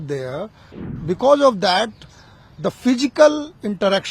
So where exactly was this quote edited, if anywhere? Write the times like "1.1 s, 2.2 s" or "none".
0.9 s